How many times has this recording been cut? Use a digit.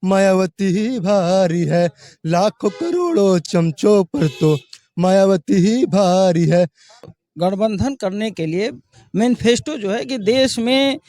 1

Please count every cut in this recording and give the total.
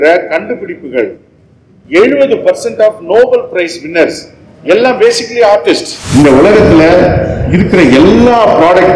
1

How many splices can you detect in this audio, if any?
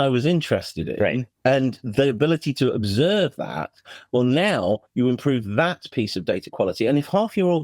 1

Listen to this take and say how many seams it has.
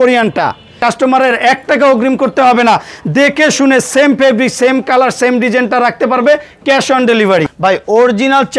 2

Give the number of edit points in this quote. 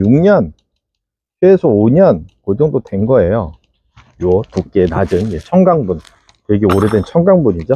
0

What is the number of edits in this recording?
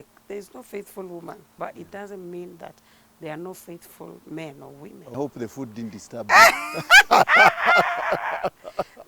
2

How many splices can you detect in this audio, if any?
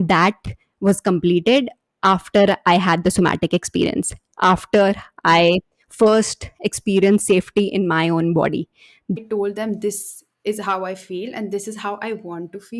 1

